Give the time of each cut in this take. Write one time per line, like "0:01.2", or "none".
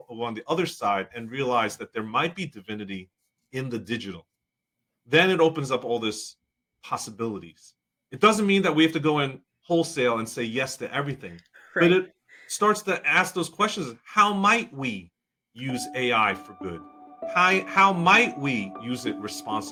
none

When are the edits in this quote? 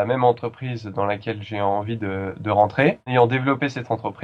0:03.1

